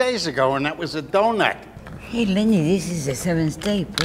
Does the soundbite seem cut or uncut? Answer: cut